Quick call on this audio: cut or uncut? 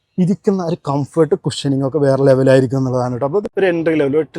cut